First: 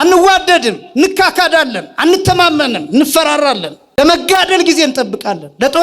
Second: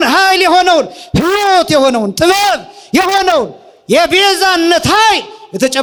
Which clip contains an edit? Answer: first; 1 cut; at 4.0 s

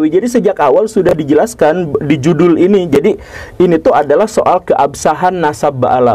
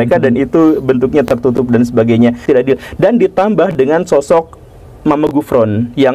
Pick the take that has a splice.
second; 1 cut; at 2.4 s

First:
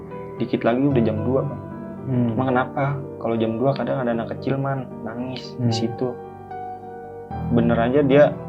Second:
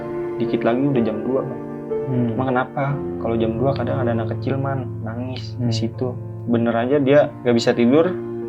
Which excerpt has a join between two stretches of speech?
second; 2 cuts; at 6.4 s, 7.4 s

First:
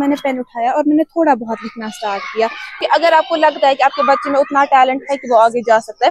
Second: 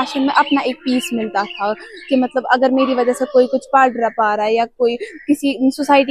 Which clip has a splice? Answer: first; 1 cut; at 2.8 s

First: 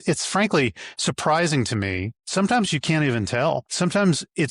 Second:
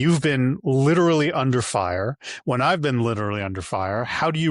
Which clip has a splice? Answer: first; 2 cuts; at 2.1 s, 3.7 s

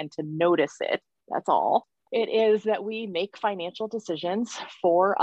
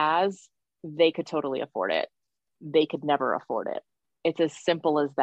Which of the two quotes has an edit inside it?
first; 2 cuts; at 1.1 s, 2.0 s

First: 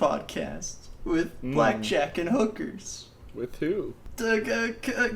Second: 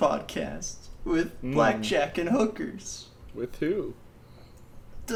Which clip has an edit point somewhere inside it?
first; 1 cut; at 4.0 s

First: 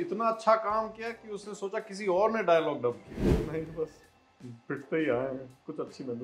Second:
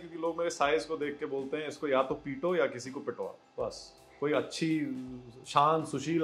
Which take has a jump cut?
first; 1 cut; at 3.3 s

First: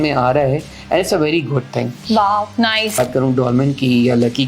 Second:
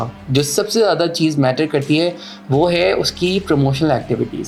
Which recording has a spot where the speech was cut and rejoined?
first; 1 cut; at 3.0 s

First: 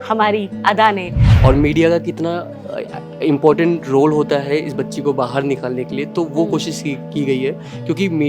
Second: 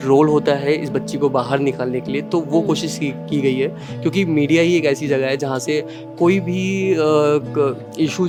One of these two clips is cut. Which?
first; 1 cut; at 1.2 s

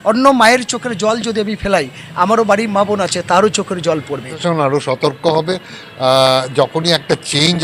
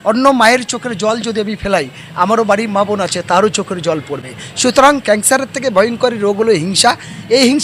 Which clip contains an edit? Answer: first; 1 cut; at 4.3 s

